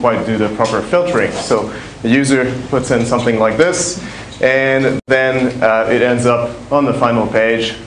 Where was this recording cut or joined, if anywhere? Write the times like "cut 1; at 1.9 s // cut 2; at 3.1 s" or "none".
cut 1; at 5.4 s